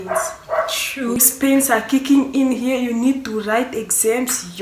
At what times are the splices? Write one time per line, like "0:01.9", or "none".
0:01.2